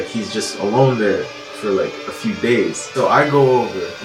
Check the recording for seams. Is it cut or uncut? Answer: uncut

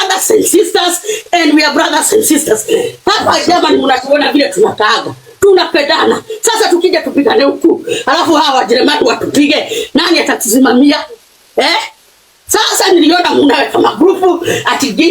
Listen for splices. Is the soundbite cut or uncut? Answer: uncut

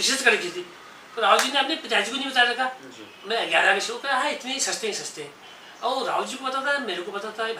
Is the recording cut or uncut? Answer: uncut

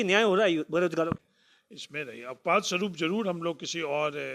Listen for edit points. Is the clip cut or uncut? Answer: cut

